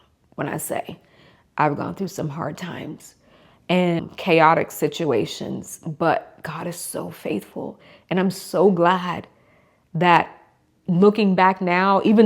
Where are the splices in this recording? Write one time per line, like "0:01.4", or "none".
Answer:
0:04.0